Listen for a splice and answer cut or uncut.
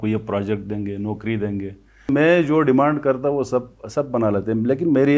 cut